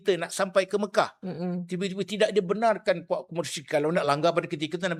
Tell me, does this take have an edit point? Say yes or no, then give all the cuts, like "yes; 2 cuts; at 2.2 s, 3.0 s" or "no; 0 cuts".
no; 0 cuts